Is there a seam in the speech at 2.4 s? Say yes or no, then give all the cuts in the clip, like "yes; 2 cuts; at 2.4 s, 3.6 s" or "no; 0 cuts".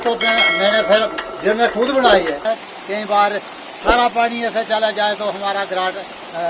yes; 1 cut; at 2.4 s